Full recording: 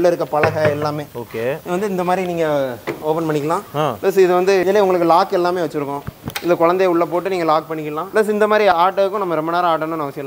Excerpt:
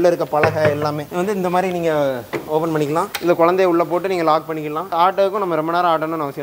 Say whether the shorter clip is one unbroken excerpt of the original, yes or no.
no